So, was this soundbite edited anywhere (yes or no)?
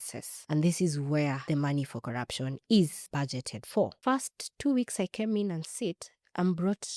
yes